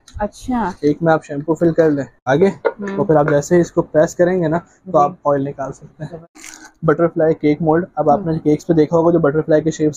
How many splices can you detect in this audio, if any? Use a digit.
2